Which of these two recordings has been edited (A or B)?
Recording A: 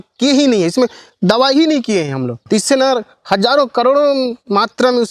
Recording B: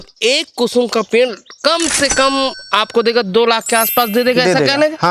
A